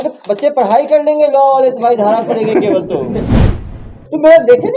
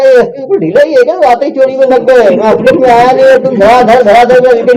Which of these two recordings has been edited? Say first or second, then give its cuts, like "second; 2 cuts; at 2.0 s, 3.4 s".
first; 1 cut; at 3.5 s